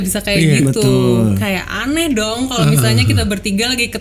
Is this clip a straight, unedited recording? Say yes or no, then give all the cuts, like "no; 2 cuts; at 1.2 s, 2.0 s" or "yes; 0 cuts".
yes; 0 cuts